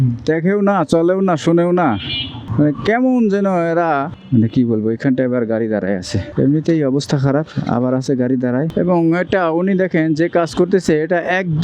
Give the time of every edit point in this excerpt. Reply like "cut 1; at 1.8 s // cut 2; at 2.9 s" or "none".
cut 1; at 4.2 s // cut 2; at 8.7 s